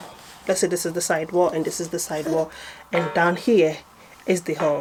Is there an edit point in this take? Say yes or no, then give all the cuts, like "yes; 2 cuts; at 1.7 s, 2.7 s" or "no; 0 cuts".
no; 0 cuts